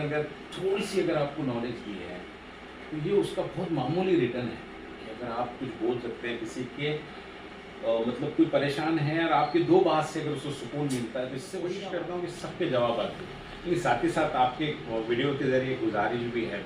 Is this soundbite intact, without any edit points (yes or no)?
no